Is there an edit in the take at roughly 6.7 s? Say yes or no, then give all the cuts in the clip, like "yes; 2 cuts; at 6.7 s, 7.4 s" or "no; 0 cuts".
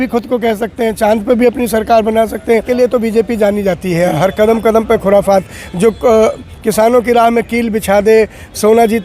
no; 1 cut; at 2.7 s